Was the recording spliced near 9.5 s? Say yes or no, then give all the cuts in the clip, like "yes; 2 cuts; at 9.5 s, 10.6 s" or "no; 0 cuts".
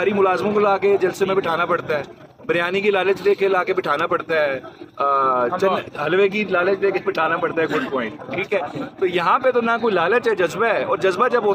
no; 0 cuts